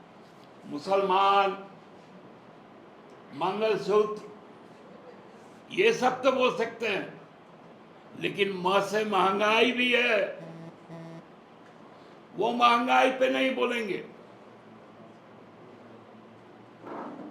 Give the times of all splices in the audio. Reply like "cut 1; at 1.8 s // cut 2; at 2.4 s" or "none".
none